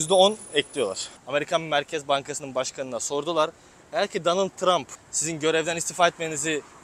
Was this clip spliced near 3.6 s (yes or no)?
no